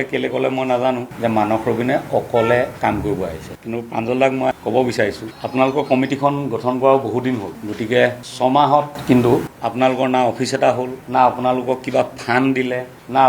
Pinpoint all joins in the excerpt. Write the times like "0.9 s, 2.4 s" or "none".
1.1 s, 3.6 s